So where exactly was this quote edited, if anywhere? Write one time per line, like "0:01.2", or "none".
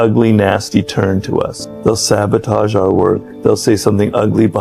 0:01.6
0:03.3